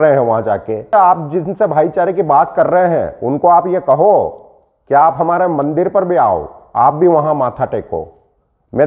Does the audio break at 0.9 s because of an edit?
yes; 1 cut; at 0.9 s

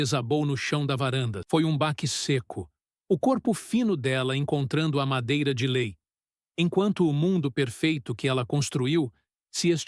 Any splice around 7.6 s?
no; 1 cut; at 1.4 s

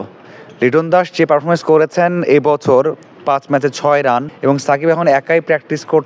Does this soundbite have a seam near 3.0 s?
no; 1 cut; at 4.3 s

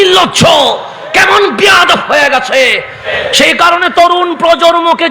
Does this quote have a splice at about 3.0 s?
yes; 1 cut; at 3.0 s

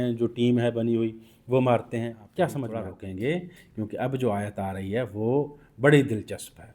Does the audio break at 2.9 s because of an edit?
yes; 1 cut; at 2.9 s

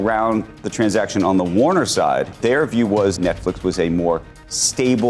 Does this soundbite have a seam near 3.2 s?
yes; 2 cuts; at 2.4 s, 3.2 s

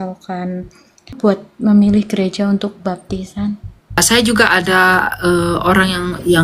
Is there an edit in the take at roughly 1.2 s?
yes; 2 cuts; at 1.2 s, 4.0 s

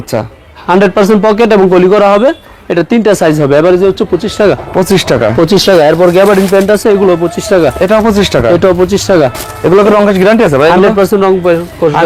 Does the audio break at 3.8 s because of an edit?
no; 0 cuts

